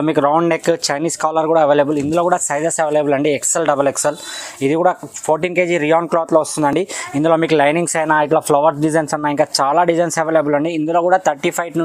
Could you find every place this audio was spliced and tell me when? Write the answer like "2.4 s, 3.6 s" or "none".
none